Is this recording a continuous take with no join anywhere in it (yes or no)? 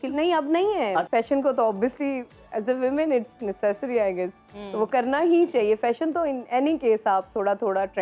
no